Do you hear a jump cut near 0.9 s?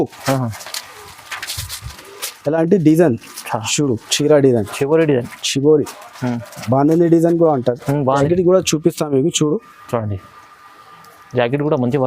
no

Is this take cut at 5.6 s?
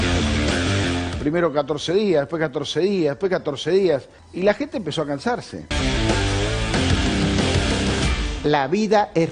yes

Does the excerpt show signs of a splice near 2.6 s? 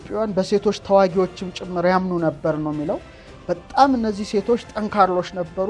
no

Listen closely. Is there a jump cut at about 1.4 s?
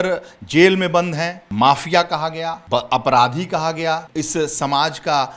yes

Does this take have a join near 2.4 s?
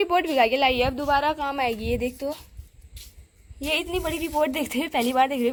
no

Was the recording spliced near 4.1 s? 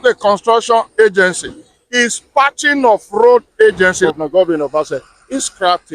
yes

